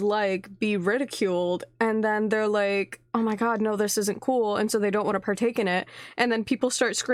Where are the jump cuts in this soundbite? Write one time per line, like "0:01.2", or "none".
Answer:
none